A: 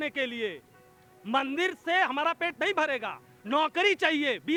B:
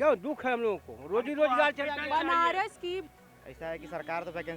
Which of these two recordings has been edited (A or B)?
B